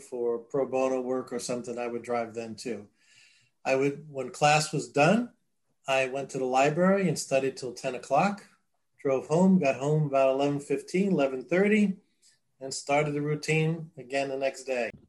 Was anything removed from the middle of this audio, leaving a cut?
no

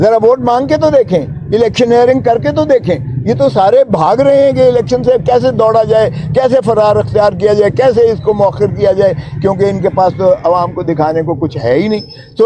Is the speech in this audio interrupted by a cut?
no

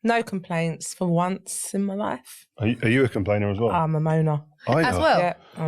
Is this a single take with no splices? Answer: yes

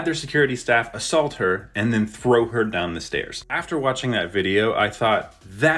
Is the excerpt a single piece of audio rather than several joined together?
yes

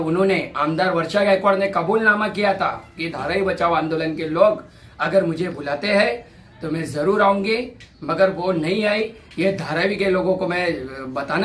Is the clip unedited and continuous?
yes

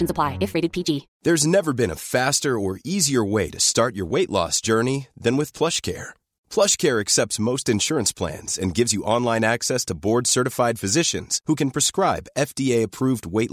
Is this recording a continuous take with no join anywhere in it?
no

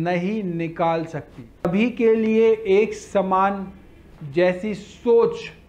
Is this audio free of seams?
no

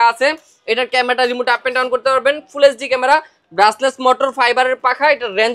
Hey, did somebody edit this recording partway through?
no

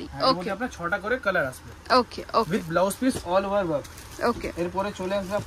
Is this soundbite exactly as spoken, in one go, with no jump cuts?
yes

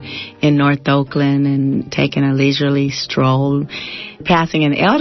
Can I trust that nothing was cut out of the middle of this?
no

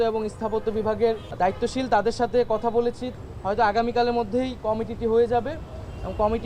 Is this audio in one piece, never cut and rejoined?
no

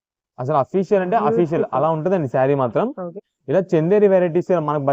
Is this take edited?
yes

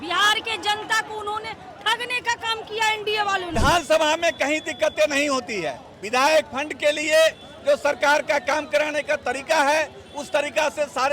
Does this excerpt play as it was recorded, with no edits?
no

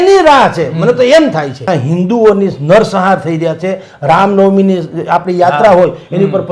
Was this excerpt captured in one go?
no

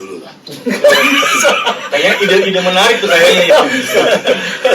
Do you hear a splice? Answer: no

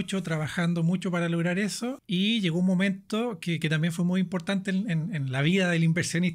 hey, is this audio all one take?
no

